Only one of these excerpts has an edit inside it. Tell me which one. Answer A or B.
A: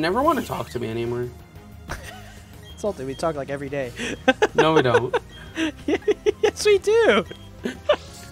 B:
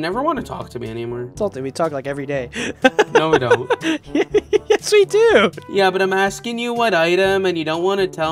B